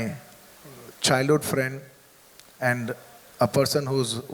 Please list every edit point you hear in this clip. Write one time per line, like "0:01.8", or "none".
none